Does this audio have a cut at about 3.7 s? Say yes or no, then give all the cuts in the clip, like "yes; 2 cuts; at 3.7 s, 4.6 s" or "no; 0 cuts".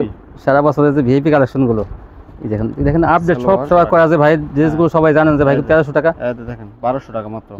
yes; 1 cut; at 3.7 s